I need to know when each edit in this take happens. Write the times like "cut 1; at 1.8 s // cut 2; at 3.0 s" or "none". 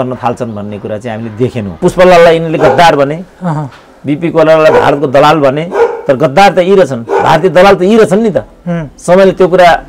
cut 1; at 1.8 s